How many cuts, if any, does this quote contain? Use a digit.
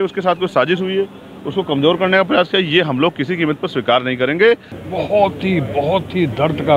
0